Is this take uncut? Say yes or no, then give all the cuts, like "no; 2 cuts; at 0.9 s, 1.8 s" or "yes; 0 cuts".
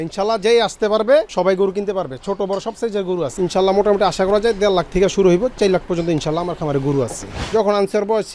no; 3 cuts; at 1.3 s, 3.3 s, 7.3 s